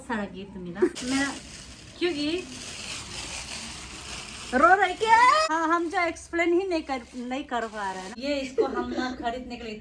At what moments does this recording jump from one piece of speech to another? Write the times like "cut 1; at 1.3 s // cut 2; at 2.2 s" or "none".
cut 1; at 0.9 s // cut 2; at 5.4 s // cut 3; at 8.1 s